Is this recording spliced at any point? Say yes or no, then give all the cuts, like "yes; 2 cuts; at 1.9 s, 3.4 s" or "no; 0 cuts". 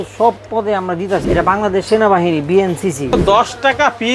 yes; 2 cuts; at 1.2 s, 3.2 s